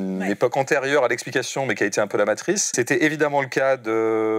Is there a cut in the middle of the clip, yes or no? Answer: yes